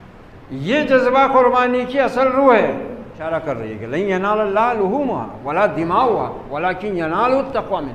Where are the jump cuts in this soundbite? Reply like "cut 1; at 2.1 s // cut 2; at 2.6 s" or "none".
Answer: cut 1; at 3.2 s